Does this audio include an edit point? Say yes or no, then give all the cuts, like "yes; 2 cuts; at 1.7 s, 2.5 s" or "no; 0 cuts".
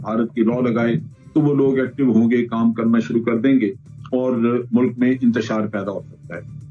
no; 0 cuts